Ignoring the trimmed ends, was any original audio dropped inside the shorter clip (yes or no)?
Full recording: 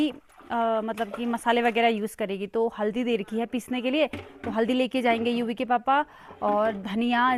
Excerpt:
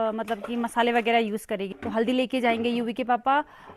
yes